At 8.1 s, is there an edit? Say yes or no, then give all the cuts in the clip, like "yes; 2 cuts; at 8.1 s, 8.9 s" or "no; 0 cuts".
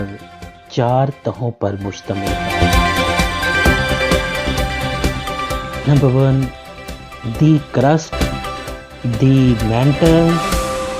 yes; 1 cut; at 8.1 s